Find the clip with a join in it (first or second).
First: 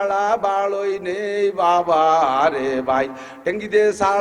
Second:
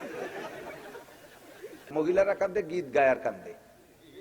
second